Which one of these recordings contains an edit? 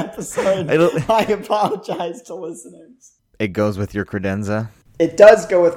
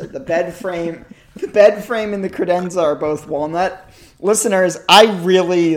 first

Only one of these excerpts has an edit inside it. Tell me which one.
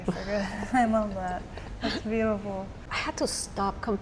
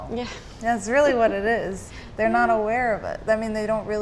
first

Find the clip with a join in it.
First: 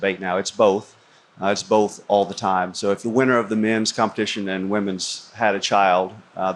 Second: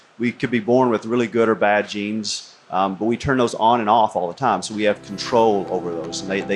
first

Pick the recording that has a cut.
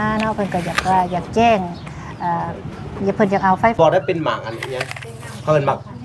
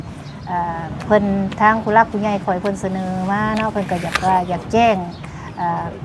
first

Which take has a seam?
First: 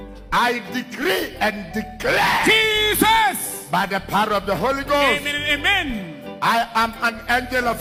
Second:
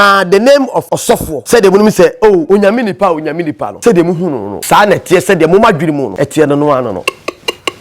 second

